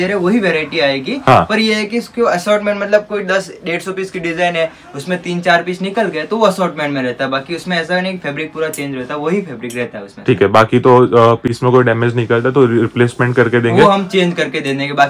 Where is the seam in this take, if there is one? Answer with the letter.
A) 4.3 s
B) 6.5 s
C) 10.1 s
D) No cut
D